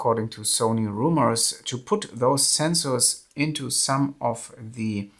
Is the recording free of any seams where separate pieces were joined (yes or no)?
yes